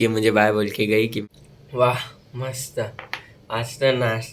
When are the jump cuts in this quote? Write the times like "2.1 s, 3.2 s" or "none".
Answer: 1.2 s